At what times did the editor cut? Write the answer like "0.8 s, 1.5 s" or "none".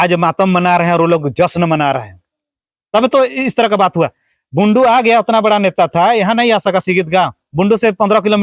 none